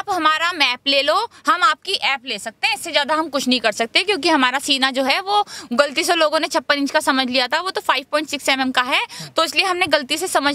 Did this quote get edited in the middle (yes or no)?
no